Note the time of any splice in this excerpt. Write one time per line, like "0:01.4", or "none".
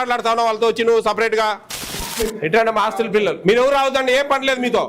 0:02.0

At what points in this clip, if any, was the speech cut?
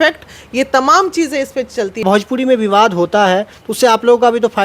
0:02.0

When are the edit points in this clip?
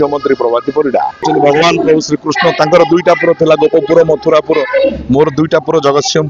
0:01.2

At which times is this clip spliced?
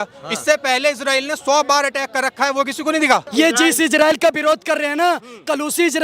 0:03.3

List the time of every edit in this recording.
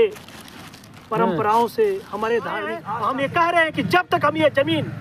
0:02.8

